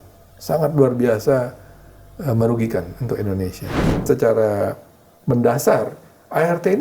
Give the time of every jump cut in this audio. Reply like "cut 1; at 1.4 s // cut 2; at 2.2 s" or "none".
cut 1; at 4.0 s